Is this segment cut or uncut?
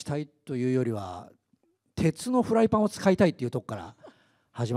uncut